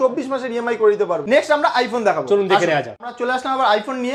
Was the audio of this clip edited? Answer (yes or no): no